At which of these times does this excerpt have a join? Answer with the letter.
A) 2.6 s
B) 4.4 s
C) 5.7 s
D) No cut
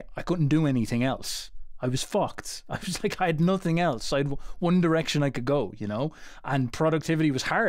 D